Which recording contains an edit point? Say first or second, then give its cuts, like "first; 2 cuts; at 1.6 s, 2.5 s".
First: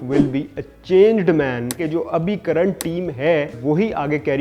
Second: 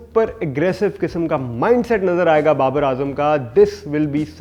first; 2 cuts; at 1.8 s, 3.6 s